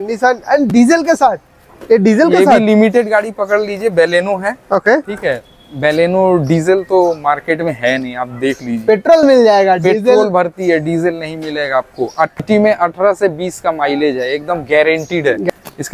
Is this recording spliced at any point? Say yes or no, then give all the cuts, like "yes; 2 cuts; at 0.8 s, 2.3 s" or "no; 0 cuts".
no; 0 cuts